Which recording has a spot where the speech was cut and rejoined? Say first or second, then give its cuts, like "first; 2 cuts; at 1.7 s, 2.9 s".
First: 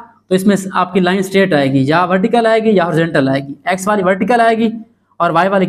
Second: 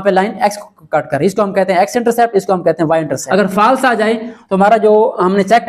second; 1 cut; at 3.2 s